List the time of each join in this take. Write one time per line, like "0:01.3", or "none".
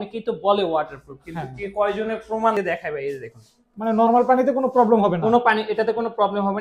0:02.5